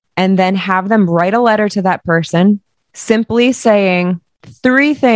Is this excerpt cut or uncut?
uncut